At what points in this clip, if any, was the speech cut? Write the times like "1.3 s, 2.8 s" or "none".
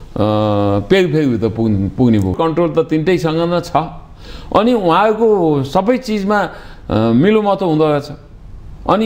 2.3 s